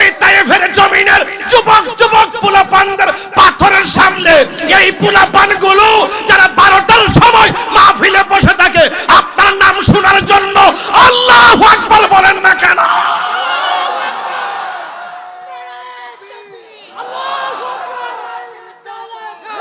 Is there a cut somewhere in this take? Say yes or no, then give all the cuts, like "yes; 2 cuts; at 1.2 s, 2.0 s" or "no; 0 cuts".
no; 0 cuts